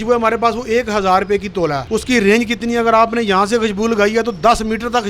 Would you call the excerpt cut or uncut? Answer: cut